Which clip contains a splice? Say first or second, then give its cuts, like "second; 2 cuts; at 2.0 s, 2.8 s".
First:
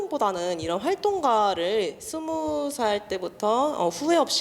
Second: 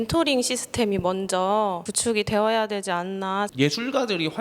second; 2 cuts; at 1.9 s, 3.5 s